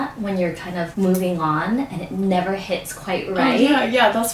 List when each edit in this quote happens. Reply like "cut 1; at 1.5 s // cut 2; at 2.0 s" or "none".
cut 1; at 0.9 s